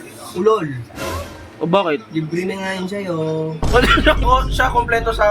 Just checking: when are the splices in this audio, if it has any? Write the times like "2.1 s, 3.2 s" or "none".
4.2 s